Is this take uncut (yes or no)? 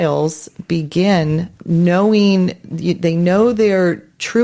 no